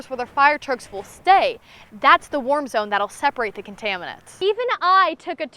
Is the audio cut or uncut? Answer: cut